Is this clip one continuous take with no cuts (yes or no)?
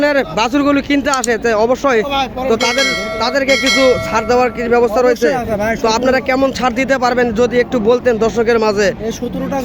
yes